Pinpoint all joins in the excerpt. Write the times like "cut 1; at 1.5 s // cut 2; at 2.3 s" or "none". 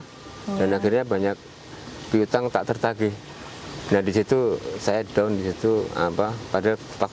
none